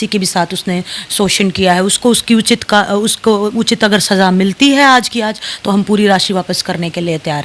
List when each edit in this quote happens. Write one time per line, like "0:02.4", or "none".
none